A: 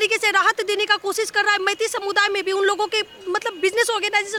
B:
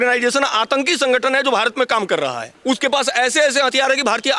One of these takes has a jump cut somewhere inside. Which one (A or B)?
B